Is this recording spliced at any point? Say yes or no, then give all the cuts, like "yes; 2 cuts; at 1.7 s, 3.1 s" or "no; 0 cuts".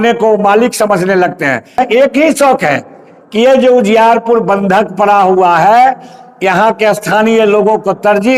yes; 1 cut; at 1.8 s